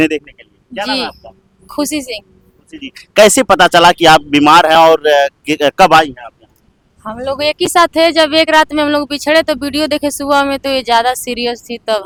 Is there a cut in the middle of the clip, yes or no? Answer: no